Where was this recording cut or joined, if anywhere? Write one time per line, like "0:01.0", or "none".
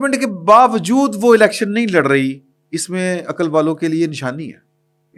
none